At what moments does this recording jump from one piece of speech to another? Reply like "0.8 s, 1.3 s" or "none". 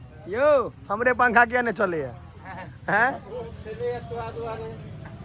none